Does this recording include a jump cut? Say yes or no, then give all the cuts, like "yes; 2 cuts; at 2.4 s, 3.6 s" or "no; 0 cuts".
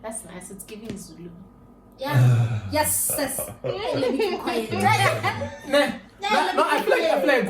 no; 0 cuts